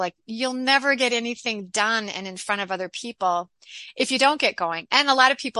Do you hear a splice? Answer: no; 0 cuts

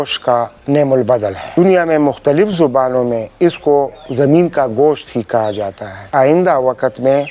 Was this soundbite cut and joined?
yes; 2 cuts; at 1.4 s, 6.1 s

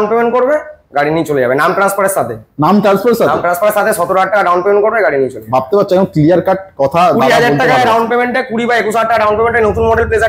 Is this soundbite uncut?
yes; 0 cuts

